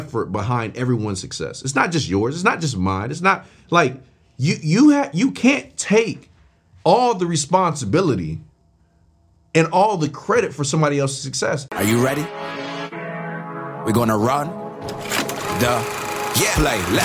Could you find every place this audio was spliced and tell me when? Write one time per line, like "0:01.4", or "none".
0:11.6